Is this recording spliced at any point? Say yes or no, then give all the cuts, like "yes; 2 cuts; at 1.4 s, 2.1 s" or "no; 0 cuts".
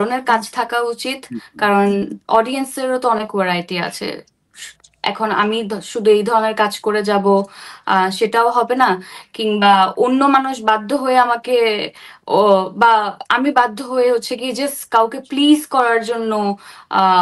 no; 0 cuts